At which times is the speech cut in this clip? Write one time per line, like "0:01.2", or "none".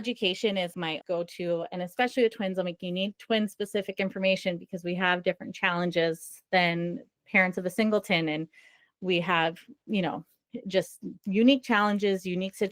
0:01.0